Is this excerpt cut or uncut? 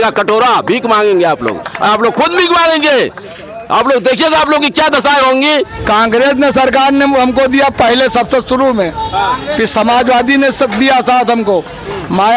cut